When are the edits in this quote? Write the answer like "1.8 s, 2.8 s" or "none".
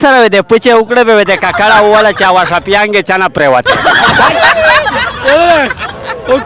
none